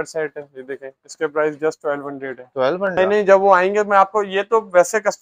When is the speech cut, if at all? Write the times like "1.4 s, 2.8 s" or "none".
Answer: 2.9 s